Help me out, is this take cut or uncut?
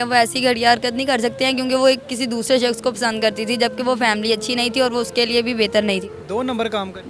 cut